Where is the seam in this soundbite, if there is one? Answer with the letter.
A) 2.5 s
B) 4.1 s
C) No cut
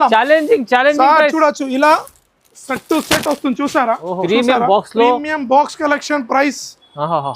B